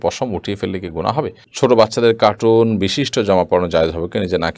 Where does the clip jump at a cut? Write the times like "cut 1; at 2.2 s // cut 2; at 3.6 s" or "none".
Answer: cut 1; at 1.4 s